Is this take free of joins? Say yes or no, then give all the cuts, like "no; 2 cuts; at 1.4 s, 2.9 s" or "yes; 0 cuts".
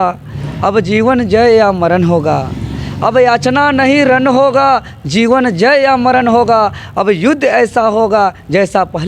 yes; 0 cuts